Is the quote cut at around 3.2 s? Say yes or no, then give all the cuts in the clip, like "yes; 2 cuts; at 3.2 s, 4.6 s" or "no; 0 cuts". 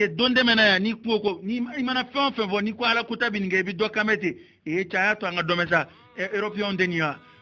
no; 1 cut; at 1.2 s